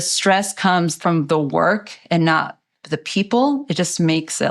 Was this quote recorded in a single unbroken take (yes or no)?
no